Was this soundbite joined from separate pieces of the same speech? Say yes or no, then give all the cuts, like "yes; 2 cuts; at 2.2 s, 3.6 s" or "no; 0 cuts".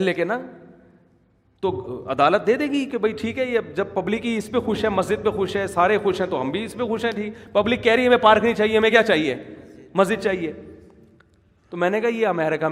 no; 0 cuts